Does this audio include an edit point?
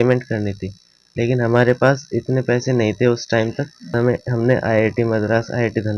yes; 1 cut; at 3.9 s

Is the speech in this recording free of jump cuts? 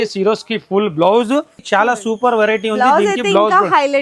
no; 1 cut; at 1.6 s

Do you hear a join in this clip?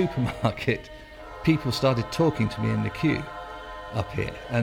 no; 0 cuts

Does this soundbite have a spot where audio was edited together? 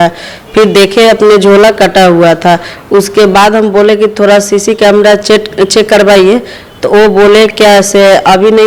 no; 0 cuts

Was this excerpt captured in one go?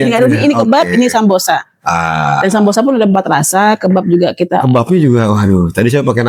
yes; 0 cuts

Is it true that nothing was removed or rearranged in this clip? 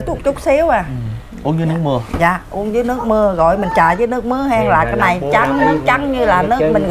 yes; 0 cuts

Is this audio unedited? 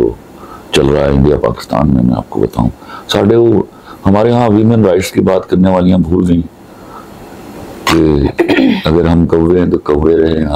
yes; 0 cuts

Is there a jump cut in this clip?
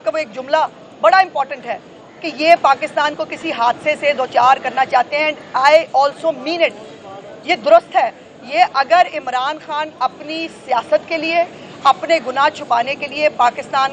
no; 0 cuts

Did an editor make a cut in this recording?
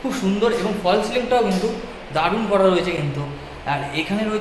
no; 0 cuts

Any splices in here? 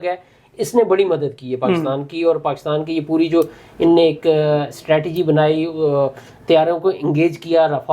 no; 0 cuts

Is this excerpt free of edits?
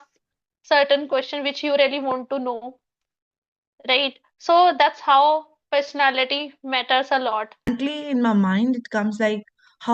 no; 1 cut; at 7.7 s

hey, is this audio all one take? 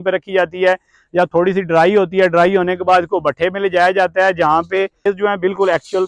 no; 1 cut; at 5.1 s

